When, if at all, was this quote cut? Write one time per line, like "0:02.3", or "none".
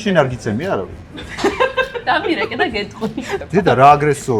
0:03.4